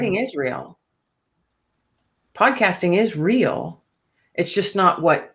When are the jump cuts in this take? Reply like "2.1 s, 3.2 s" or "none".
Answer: none